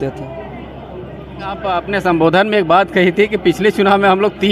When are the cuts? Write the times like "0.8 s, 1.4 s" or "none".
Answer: 1.6 s